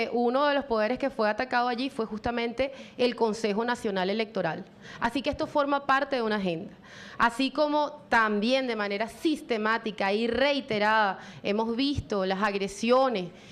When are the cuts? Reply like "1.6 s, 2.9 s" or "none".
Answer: 6.6 s